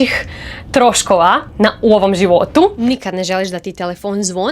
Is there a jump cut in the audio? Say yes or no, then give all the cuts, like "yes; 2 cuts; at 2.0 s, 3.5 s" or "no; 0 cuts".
yes; 1 cut; at 2.8 s